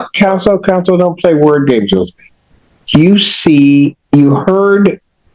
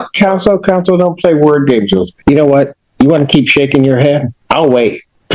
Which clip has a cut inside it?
second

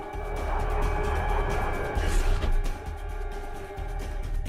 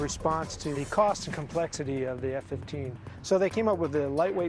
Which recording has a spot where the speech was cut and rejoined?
second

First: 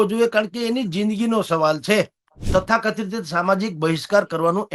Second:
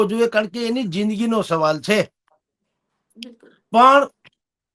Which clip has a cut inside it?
first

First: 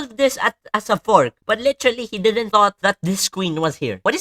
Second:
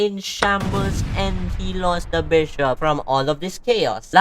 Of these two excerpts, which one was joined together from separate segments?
second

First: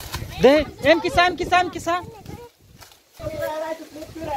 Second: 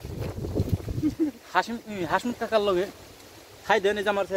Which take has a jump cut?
first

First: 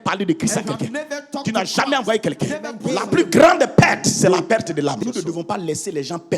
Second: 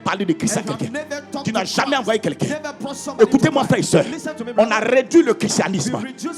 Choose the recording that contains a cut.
first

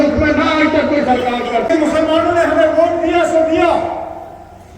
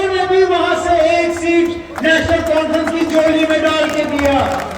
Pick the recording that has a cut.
first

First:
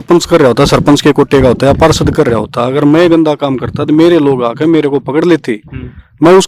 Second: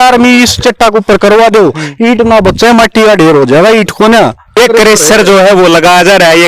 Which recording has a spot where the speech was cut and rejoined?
second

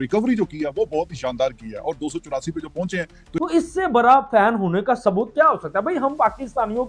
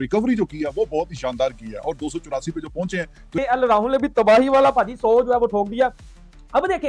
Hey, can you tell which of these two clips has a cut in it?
first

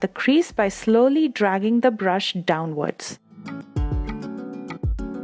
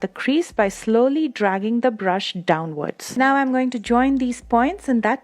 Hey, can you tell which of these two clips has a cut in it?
second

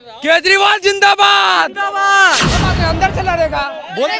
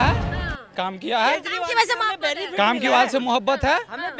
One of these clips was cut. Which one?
first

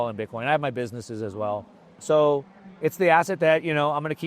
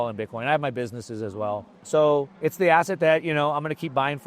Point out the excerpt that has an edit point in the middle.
second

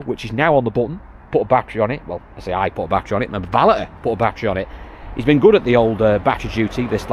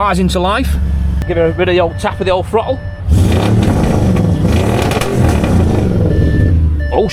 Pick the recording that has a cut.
second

